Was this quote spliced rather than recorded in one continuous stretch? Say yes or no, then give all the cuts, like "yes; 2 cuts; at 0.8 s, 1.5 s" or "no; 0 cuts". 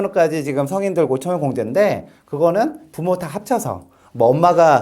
no; 0 cuts